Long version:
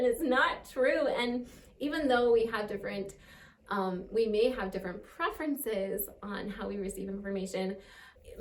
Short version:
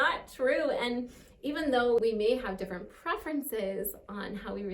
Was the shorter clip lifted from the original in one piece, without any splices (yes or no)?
no